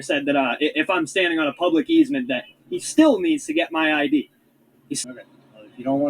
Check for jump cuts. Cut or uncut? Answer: cut